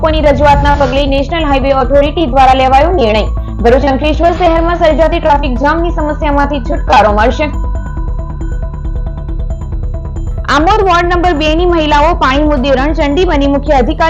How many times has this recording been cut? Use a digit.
0